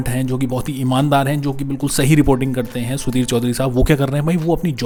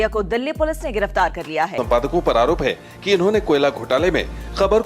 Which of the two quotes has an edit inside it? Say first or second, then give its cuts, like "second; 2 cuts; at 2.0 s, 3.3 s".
second; 1 cut; at 1.8 s